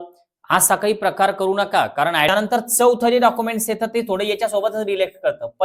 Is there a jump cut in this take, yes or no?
yes